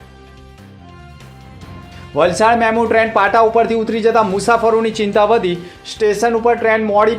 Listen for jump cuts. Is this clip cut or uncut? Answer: cut